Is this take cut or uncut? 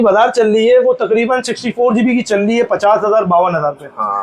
uncut